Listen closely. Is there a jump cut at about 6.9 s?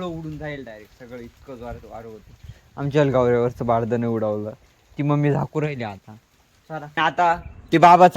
yes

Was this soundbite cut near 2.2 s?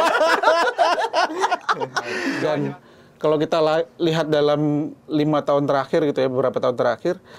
yes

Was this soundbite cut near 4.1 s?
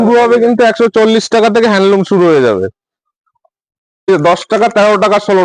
yes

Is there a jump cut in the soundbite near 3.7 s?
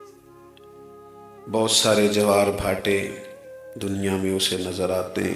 no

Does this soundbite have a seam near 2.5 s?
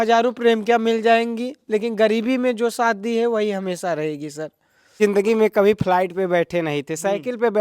no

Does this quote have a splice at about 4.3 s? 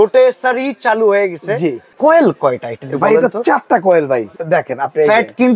yes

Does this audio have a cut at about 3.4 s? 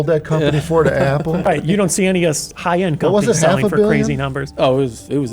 no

